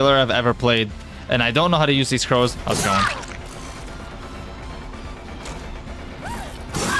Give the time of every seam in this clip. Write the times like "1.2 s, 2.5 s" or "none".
1.1 s